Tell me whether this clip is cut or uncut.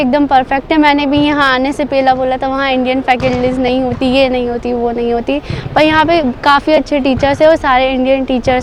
uncut